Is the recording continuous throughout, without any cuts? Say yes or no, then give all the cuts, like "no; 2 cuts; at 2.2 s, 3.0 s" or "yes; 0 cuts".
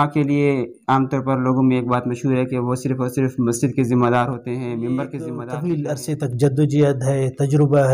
no; 1 cut; at 5.5 s